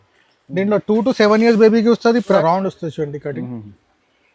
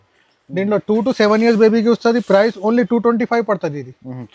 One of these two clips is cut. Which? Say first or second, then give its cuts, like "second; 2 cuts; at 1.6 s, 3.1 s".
first; 1 cut; at 2.4 s